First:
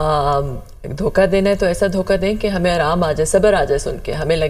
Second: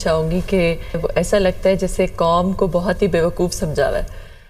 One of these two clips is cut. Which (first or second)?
second